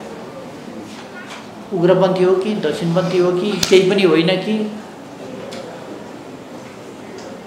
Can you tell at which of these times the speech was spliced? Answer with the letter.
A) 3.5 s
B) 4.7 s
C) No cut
C